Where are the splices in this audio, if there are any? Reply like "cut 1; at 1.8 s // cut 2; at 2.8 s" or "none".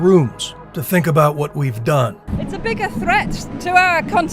cut 1; at 2.2 s